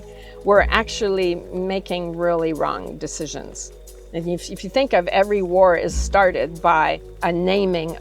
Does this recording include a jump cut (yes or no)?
yes